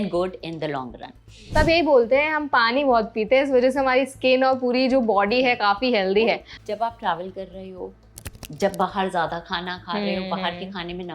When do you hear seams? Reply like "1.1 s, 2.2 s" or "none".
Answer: 1.3 s, 6.5 s